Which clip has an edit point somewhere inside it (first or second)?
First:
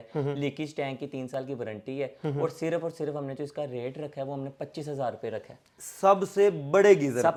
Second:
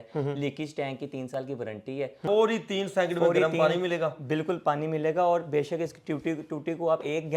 second